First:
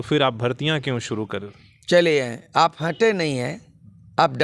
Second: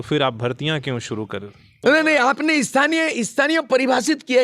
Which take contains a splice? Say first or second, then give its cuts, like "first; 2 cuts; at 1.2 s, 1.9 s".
second; 1 cut; at 1.8 s